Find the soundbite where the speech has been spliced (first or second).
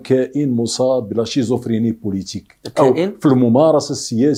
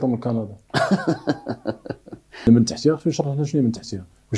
second